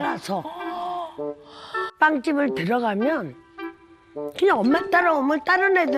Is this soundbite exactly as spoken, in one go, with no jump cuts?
no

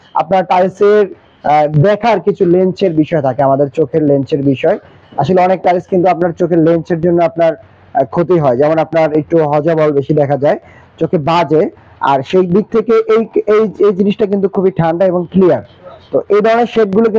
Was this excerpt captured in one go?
yes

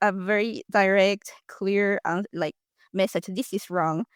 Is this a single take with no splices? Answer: yes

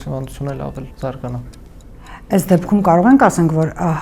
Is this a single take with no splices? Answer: no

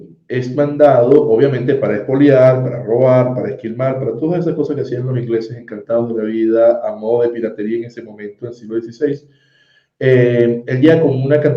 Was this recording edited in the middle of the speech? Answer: no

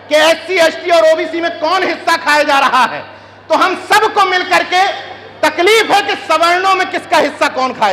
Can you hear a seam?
no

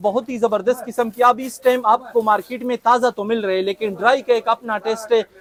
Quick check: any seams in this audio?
no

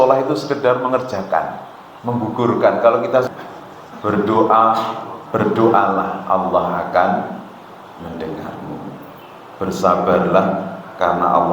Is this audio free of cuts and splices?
no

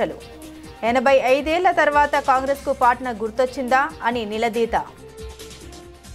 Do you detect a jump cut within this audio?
no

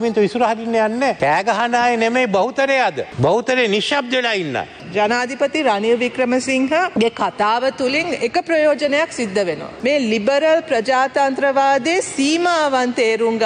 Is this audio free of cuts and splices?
no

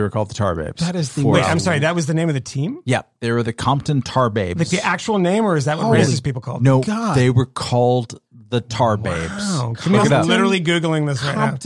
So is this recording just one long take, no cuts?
yes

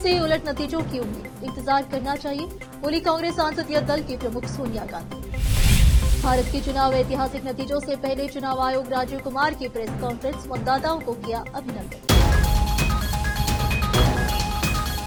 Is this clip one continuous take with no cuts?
yes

